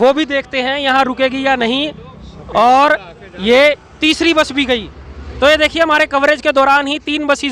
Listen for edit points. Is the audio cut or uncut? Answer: uncut